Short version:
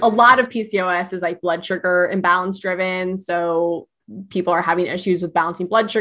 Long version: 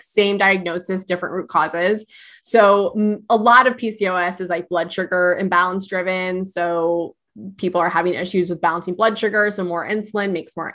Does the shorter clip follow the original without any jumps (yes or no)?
yes